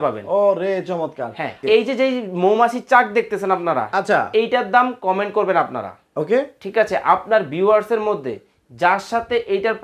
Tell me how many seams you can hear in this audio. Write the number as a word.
one